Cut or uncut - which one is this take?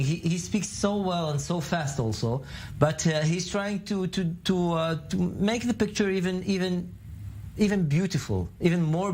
uncut